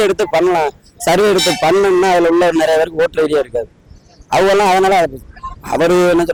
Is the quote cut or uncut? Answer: uncut